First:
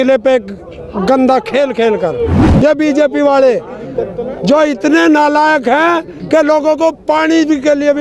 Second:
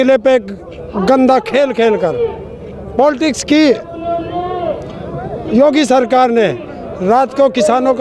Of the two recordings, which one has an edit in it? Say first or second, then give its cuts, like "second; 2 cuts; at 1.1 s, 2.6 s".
first; 1 cut; at 2.4 s